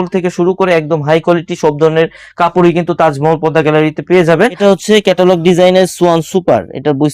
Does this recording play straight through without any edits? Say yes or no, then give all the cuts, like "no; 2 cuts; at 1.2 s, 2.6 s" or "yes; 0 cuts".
no; 1 cut; at 4.6 s